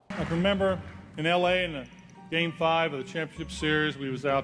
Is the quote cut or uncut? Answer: uncut